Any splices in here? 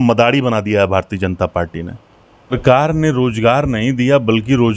yes; 1 cut; at 2.5 s

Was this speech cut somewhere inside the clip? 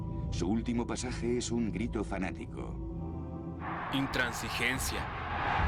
no; 0 cuts

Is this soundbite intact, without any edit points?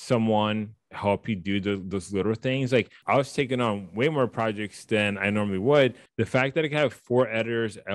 no; 2 cuts; at 3.0 s, 6.0 s

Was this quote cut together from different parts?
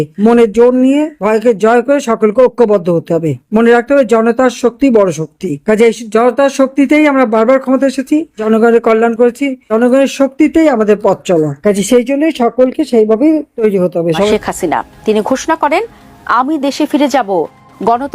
yes; 1 cut; at 14.3 s

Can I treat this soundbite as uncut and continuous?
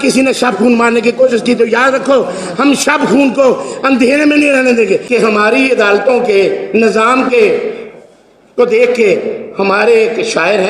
no; 1 cut; at 5.0 s

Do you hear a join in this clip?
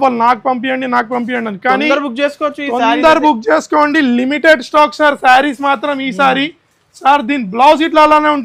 no; 0 cuts

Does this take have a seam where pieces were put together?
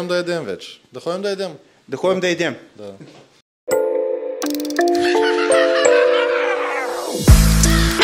yes; 1 cut; at 3.4 s

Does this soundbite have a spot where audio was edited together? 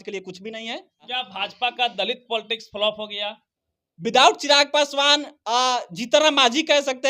yes; 1 cut; at 1.1 s

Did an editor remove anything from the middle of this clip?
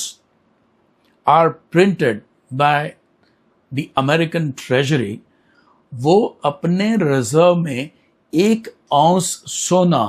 no; 0 cuts

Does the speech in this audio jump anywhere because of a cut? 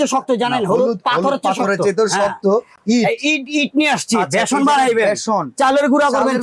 no; 0 cuts

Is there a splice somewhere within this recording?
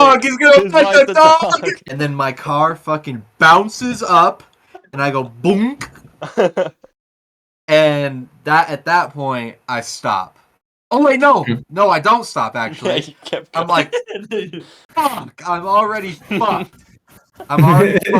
yes; 1 cut; at 1.8 s

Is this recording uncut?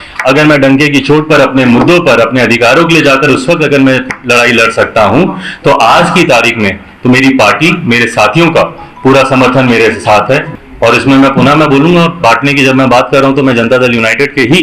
no; 1 cut; at 10.5 s

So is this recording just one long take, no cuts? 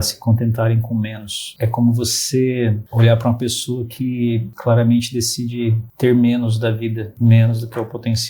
no; 5 cuts; at 1.5 s, 2.8 s, 4.5 s, 5.8 s, 7.1 s

